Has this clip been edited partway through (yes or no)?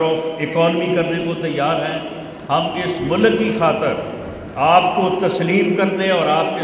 no